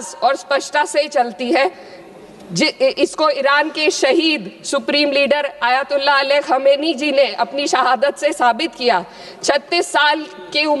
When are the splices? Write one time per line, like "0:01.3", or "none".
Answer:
none